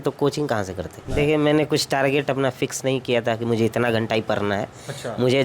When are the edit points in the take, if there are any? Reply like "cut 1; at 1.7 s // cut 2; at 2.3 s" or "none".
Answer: cut 1; at 1.0 s